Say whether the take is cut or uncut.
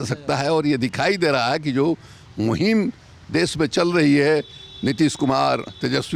uncut